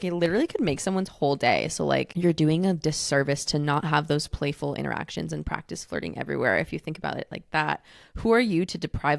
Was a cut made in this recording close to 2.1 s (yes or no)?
yes